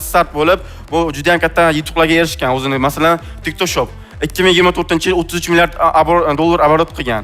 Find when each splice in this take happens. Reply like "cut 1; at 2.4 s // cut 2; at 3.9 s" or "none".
none